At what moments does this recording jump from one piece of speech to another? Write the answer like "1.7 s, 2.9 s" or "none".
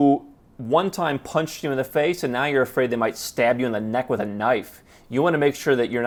none